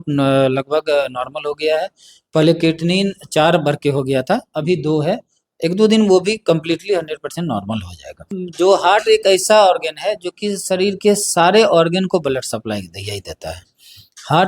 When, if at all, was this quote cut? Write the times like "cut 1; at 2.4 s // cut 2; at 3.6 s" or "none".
cut 1; at 8.2 s